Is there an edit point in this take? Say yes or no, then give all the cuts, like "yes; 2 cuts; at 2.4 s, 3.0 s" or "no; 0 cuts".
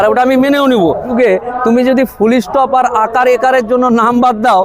yes; 1 cut; at 1.1 s